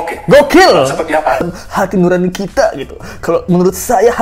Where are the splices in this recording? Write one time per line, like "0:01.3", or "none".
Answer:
0:01.4